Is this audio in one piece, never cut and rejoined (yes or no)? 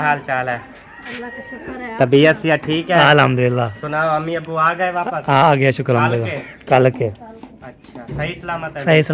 yes